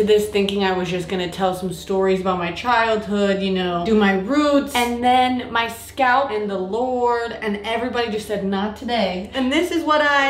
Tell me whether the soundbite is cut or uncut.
cut